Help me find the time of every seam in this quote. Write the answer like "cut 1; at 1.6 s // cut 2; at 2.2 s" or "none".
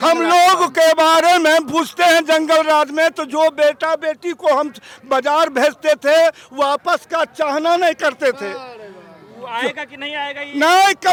none